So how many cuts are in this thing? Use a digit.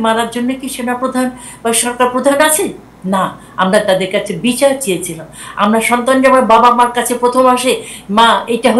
0